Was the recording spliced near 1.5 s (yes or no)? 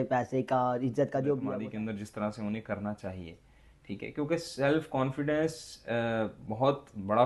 yes